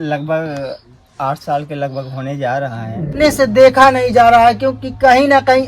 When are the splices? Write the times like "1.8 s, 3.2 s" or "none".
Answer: 3.2 s